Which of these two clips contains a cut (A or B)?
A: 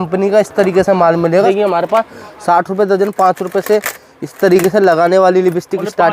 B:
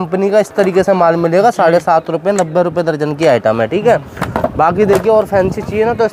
A